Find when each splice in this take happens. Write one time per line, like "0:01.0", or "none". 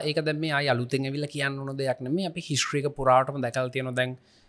none

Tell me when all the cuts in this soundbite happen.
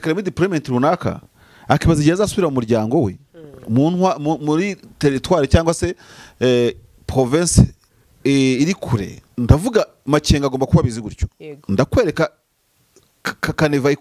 0:09.2

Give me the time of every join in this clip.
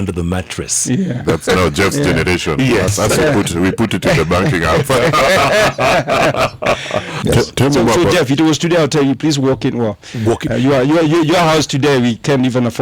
0:07.1

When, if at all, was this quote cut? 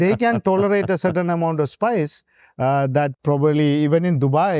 0:03.1

